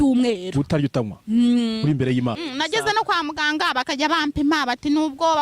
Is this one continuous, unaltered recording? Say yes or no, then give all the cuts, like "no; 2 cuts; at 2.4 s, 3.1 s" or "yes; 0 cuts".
no; 1 cut; at 2.5 s